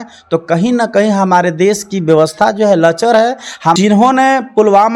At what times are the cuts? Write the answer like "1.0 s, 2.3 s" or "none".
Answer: 3.8 s